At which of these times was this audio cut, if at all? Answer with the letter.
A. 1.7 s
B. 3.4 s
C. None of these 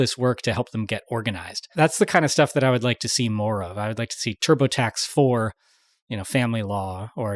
A